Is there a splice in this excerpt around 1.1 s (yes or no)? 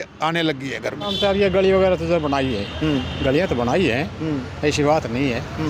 yes